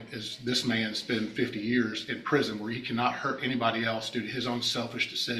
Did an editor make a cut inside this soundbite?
no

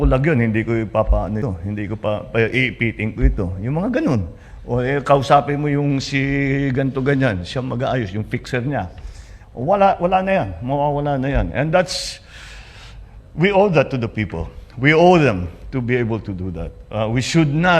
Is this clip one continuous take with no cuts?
no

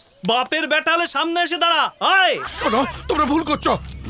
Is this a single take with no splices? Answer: no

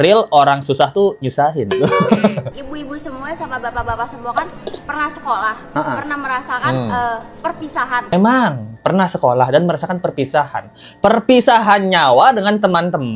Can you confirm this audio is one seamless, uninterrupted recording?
no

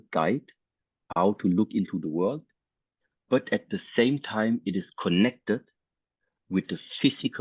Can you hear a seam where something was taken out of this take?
no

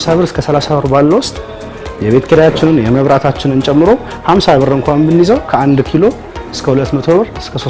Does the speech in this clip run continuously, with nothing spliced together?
yes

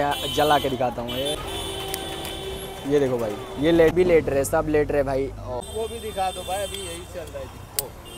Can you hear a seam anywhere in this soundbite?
yes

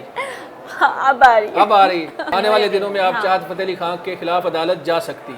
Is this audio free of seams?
no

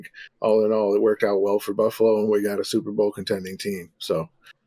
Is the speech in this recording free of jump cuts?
yes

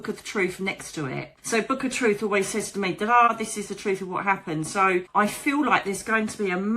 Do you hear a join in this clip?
yes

